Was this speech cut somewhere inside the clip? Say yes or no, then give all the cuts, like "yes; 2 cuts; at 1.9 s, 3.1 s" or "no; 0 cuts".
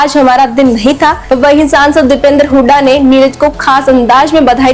yes; 1 cut; at 1.2 s